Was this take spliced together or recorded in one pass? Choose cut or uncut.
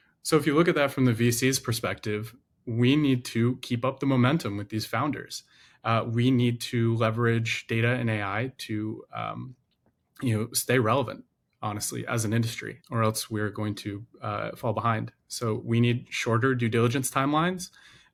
uncut